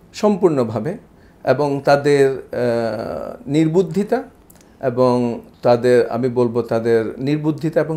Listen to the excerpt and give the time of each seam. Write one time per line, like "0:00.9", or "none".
none